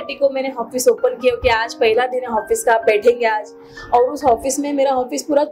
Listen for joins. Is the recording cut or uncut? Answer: uncut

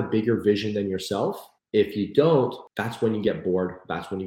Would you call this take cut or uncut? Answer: cut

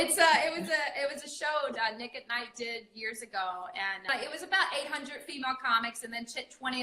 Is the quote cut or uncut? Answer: cut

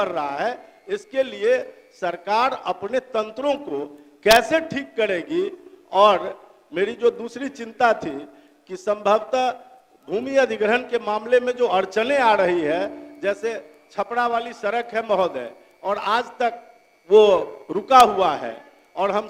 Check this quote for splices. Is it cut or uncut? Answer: uncut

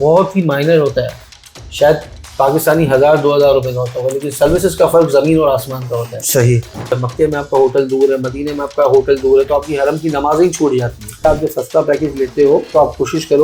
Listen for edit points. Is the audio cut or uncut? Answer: cut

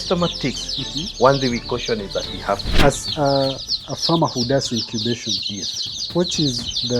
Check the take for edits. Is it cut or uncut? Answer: cut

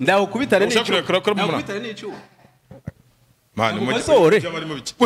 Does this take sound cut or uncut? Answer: uncut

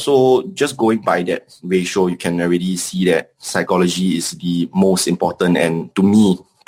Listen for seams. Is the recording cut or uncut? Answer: uncut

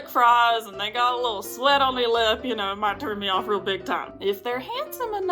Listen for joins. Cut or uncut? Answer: cut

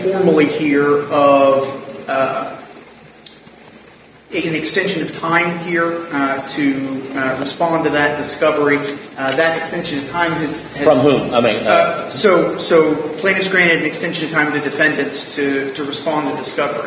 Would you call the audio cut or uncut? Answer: uncut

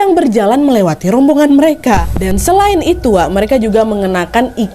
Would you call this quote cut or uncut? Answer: cut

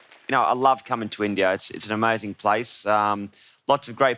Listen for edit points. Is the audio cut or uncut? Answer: uncut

